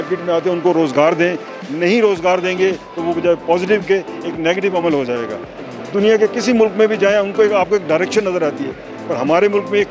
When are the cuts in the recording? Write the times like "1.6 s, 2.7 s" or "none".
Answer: 5.4 s